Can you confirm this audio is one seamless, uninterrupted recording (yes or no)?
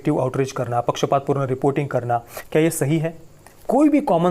no